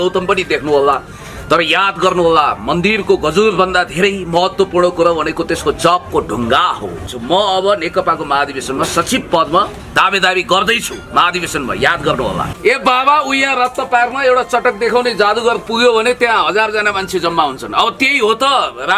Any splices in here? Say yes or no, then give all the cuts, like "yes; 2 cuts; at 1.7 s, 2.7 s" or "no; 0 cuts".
yes; 2 cuts; at 7.1 s, 12.5 s